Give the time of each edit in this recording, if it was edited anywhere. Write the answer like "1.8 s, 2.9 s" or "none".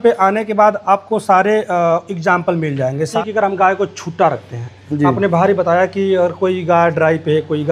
3.1 s